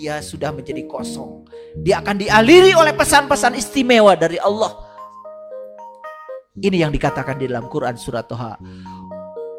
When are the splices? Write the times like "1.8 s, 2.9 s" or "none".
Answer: 8.5 s